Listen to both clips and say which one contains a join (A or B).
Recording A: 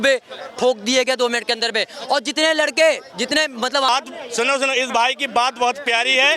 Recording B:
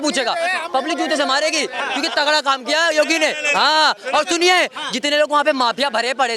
A